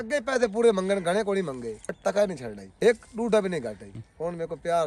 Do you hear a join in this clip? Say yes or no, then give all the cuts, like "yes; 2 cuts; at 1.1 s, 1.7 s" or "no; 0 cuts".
yes; 3 cuts; at 1.8 s, 2.8 s, 3.9 s